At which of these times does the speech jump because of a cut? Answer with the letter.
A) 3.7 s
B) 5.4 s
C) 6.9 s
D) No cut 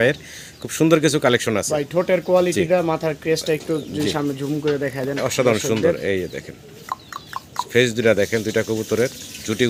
D